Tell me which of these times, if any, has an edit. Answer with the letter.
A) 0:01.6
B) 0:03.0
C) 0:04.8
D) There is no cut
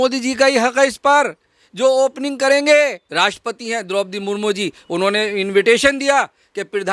B